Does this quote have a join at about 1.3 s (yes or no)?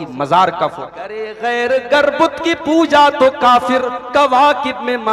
yes